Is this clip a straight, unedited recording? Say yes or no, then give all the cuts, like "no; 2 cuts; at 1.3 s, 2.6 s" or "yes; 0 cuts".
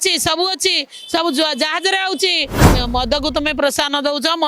no; 1 cut; at 2.6 s